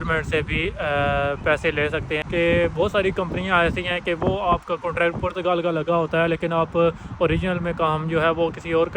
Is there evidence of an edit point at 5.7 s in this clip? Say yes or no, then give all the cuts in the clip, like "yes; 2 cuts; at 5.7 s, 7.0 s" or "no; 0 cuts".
no; 1 cut; at 2.2 s